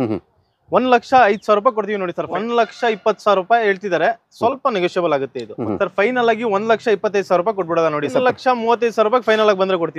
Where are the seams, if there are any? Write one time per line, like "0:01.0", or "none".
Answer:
0:02.3
0:05.6
0:08.1